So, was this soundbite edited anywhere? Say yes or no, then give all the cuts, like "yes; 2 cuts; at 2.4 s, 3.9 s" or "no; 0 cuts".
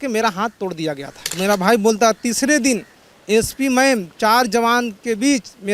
yes; 1 cut; at 1.2 s